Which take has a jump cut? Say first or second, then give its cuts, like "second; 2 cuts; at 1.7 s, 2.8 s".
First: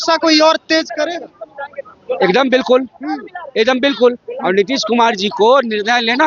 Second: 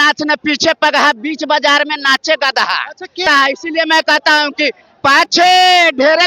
second; 1 cut; at 3.3 s